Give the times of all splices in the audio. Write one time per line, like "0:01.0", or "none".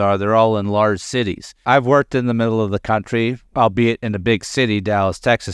0:01.6
0:03.4